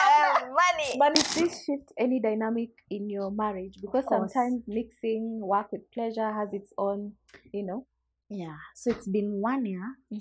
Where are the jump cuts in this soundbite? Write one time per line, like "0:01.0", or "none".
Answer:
0:01.1